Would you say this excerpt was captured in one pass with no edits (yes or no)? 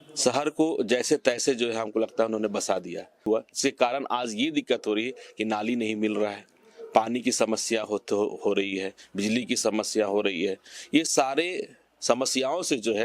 no